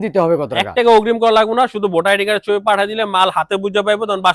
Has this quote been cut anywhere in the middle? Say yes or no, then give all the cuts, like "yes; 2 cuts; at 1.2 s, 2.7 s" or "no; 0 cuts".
no; 0 cuts